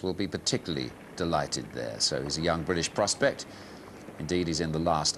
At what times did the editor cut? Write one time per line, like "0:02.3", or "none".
none